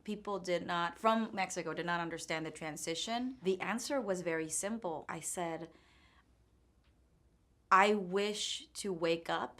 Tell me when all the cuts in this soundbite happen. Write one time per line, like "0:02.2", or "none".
0:03.4
0:05.1